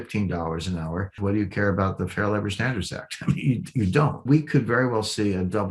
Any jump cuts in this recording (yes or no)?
yes